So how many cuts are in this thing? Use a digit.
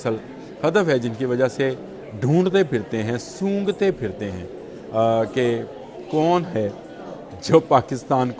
0